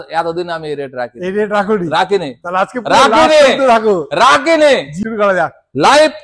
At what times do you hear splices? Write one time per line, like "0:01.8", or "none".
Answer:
0:04.9